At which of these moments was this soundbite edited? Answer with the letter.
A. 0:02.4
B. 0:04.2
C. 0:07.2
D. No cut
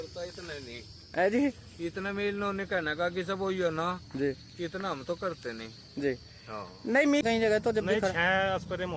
C